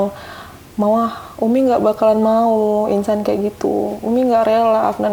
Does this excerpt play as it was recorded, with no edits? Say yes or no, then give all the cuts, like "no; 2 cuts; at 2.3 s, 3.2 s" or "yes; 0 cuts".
yes; 0 cuts